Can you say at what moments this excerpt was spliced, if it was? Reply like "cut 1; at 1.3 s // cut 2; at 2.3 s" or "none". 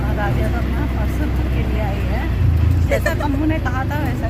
none